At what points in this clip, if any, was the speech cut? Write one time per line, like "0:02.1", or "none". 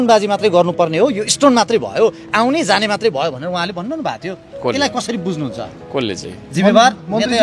none